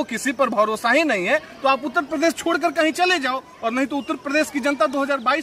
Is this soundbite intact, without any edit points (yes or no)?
yes